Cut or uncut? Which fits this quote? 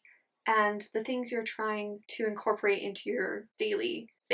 cut